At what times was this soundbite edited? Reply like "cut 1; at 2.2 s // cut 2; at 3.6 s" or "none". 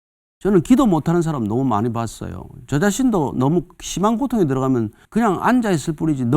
cut 1; at 5.0 s